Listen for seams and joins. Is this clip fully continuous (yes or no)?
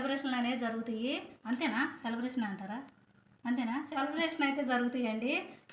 yes